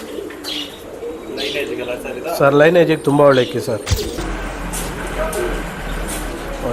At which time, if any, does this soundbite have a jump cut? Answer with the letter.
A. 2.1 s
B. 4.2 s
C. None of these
B